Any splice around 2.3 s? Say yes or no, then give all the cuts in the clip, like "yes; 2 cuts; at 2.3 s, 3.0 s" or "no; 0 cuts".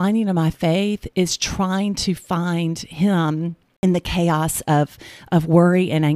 no; 1 cut; at 3.6 s